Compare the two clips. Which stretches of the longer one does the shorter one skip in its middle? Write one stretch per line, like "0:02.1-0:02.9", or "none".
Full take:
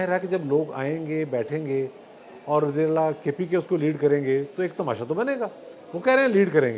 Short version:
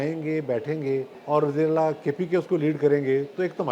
0:02.0-0:02.3